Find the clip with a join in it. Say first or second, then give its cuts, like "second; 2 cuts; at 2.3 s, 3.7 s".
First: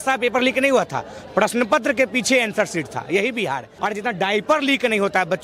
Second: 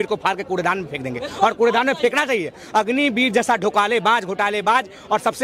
first; 1 cut; at 3.7 s